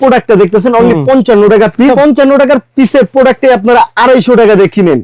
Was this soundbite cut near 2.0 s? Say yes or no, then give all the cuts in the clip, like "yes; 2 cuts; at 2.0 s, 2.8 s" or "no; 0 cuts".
yes; 1 cut; at 2.0 s